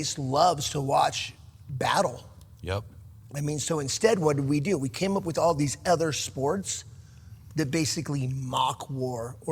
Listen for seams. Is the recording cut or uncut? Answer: uncut